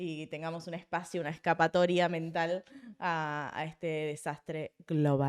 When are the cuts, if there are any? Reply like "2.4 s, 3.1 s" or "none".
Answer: none